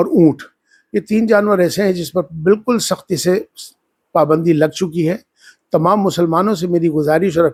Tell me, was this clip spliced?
no; 0 cuts

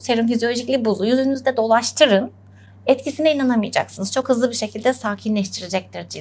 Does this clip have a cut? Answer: no; 0 cuts

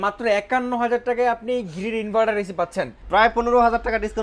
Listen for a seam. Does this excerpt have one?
yes; 1 cut; at 3.0 s

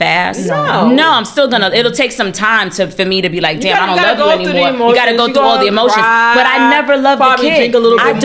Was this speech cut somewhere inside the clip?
no; 0 cuts

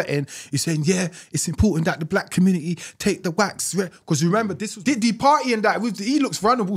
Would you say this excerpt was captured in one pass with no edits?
no; 1 cut; at 4.7 s

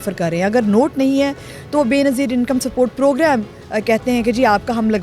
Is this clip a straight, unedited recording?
yes; 0 cuts

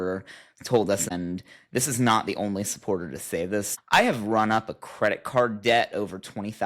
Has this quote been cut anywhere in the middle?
yes; 2 cuts; at 1.1 s, 3.8 s

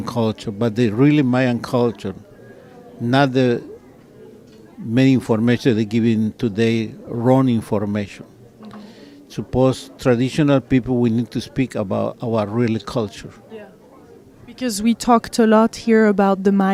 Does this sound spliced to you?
no; 0 cuts

